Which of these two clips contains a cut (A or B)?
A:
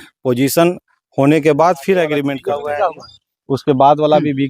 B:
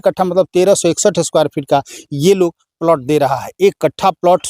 A